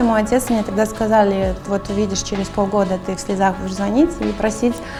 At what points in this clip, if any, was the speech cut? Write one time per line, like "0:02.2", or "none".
none

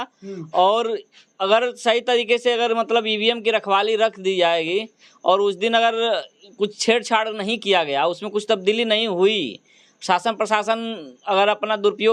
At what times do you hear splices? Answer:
none

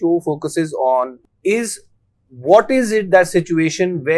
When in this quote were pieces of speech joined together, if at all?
0:01.2

